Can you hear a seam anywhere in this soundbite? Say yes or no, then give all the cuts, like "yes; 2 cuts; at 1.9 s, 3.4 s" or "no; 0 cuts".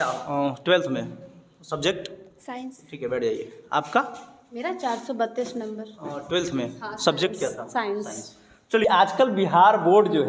yes; 1 cut; at 8.8 s